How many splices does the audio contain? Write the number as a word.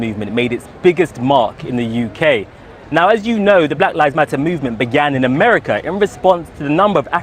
one